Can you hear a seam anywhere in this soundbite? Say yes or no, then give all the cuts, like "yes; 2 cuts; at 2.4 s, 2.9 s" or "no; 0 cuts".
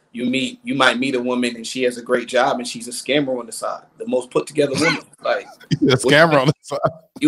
no; 0 cuts